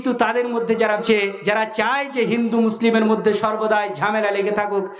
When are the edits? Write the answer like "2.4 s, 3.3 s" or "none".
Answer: 1.0 s